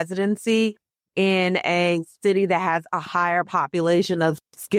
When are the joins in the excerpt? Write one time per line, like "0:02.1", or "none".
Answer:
none